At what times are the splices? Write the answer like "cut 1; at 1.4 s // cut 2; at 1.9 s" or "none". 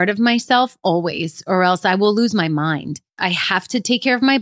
cut 1; at 3.2 s